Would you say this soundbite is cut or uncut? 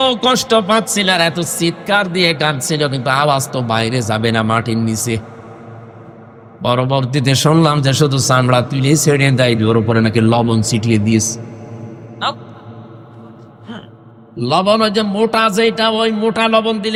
uncut